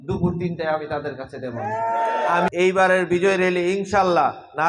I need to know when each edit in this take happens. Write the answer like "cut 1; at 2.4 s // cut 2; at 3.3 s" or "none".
cut 1; at 2.5 s